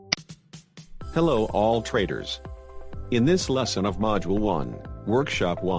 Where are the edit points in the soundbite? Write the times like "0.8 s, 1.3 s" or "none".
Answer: none